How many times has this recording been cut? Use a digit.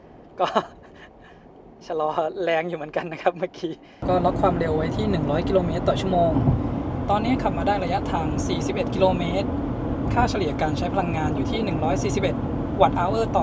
1